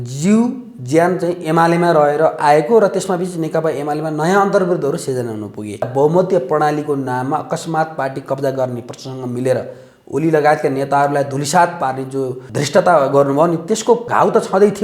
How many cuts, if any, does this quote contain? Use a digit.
3